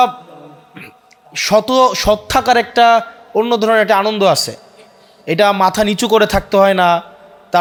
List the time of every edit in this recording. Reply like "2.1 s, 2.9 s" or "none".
none